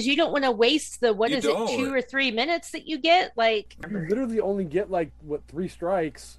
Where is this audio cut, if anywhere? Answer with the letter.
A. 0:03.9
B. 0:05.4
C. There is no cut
A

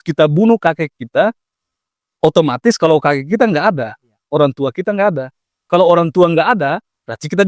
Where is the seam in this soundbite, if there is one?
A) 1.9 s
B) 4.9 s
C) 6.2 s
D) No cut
D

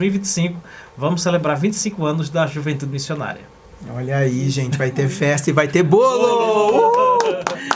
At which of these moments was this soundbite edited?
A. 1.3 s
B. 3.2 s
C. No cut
C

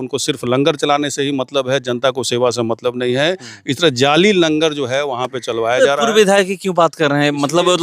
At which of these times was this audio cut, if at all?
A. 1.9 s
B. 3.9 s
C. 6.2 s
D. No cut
D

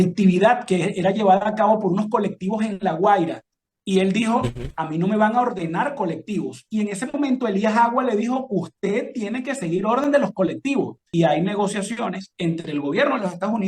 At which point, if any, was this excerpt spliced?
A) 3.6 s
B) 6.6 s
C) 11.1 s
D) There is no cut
C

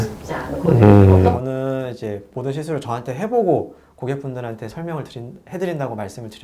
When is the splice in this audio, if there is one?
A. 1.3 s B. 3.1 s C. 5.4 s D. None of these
A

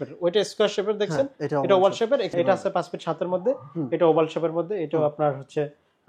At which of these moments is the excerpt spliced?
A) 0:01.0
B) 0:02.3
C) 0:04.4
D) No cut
B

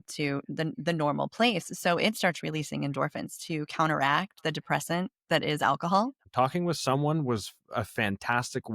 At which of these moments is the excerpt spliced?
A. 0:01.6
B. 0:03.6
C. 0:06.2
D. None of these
C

